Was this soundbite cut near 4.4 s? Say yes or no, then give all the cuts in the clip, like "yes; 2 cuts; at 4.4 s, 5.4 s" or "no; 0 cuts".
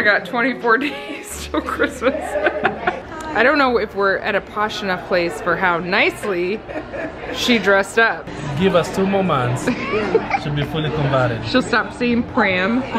no; 2 cuts; at 3.1 s, 8.4 s